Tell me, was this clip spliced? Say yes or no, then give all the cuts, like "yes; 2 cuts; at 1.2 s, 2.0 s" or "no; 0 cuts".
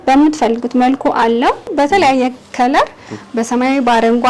yes; 1 cut; at 1.7 s